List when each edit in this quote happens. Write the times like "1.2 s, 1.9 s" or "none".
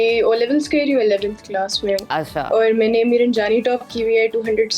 none